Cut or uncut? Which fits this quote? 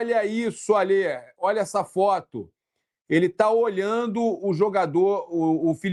uncut